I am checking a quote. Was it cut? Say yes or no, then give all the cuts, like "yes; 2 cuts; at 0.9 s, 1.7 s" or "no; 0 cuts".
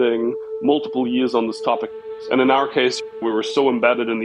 yes; 1 cut; at 2.0 s